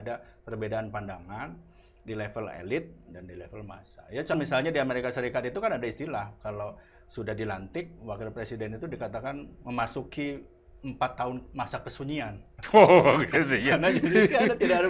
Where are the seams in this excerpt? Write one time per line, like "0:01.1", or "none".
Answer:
0:04.3